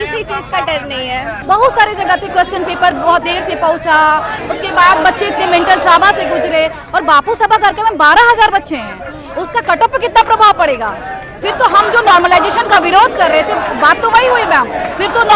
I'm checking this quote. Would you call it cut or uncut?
cut